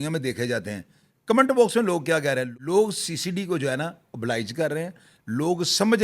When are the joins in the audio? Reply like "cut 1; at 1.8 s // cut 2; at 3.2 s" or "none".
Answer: cut 1; at 2.5 s

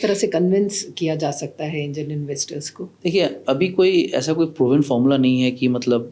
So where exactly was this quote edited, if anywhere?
none

